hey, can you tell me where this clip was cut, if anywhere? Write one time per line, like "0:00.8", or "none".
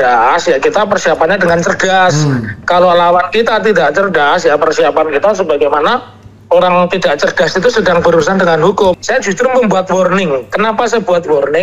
0:09.0